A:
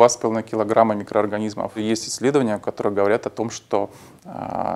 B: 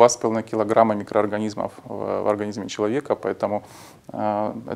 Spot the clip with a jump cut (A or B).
A